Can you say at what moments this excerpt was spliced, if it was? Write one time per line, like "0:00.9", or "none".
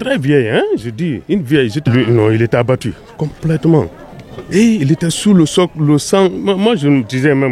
0:01.9